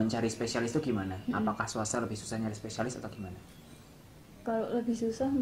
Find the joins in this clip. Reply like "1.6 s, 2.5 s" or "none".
none